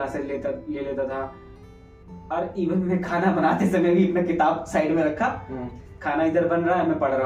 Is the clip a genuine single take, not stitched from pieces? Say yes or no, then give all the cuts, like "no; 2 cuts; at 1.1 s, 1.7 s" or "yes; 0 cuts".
yes; 0 cuts